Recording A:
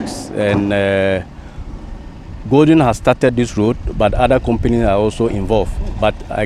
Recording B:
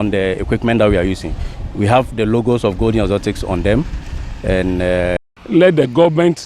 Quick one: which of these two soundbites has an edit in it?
B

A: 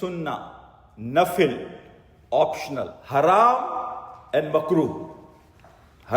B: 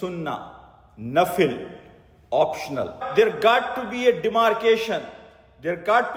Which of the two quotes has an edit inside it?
A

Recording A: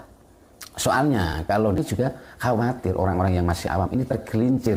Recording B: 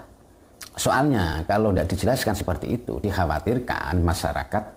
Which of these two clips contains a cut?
A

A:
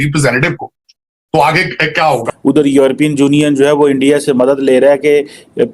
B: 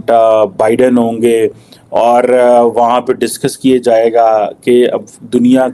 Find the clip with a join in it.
A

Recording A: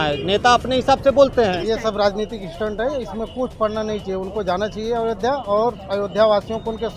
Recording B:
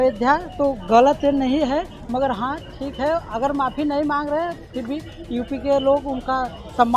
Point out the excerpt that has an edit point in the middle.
A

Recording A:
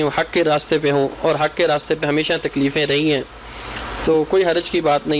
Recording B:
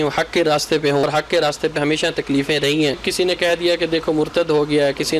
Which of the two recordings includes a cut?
B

